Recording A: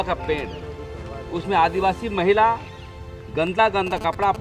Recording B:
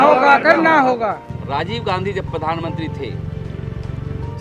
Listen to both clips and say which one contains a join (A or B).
B